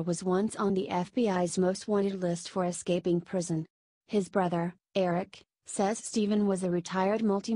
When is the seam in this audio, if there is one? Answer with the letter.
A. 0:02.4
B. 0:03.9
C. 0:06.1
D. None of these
D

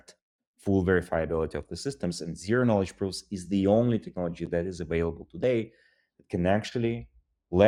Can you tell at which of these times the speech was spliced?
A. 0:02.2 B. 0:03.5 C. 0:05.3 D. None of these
D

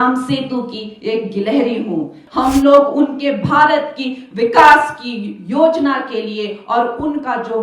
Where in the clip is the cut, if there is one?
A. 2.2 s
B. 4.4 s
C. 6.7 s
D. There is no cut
A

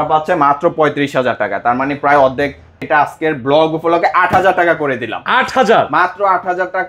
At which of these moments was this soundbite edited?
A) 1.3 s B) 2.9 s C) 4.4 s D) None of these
B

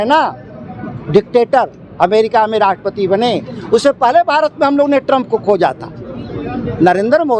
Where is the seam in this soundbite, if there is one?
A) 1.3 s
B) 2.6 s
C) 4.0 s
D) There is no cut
D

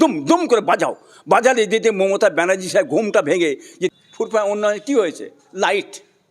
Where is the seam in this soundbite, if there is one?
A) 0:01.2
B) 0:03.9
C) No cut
B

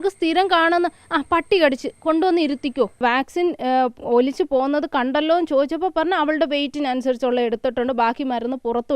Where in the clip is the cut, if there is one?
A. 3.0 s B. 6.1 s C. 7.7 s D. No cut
A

